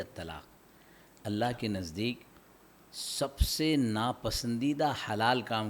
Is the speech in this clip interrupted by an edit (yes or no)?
no